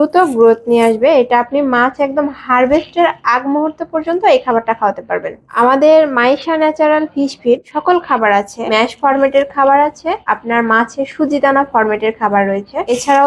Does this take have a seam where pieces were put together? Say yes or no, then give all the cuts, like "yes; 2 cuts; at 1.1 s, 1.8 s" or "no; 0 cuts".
no; 0 cuts